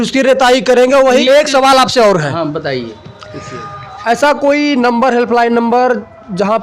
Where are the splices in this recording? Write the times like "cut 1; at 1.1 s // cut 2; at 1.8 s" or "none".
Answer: cut 1; at 1.2 s